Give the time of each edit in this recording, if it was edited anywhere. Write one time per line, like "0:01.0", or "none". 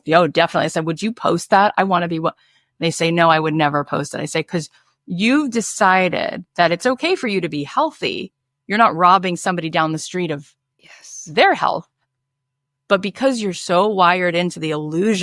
0:13.6